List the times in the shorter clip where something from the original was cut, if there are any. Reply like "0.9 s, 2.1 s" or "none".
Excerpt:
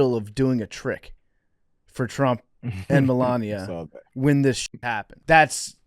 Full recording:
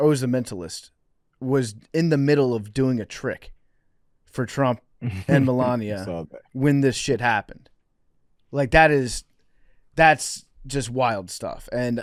4.6 s